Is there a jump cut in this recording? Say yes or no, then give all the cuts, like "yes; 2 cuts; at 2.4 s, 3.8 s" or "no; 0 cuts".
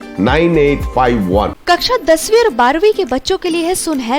yes; 1 cut; at 1.6 s